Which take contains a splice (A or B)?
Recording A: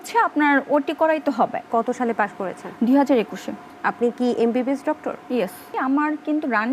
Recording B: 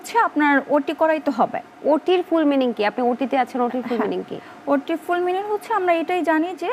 A